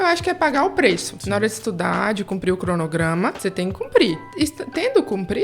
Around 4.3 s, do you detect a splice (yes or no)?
yes